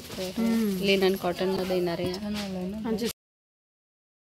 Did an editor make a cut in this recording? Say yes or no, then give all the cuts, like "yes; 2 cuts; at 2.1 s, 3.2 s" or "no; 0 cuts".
no; 0 cuts